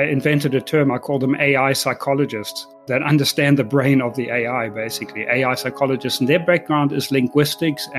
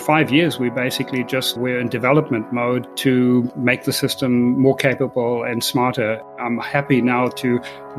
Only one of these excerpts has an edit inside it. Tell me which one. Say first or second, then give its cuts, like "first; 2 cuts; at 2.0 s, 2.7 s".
second; 4 cuts; at 1.5 s, 2.9 s, 3.5 s, 6.3 s